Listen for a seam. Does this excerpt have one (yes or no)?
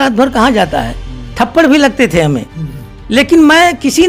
no